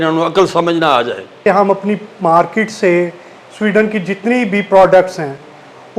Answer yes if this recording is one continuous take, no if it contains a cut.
no